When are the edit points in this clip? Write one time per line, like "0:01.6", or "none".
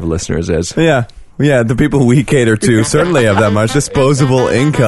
0:03.7